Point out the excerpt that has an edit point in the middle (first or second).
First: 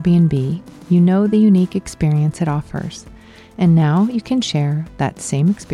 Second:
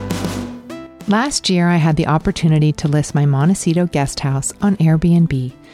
second